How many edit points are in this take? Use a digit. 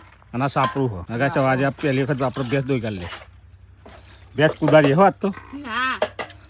1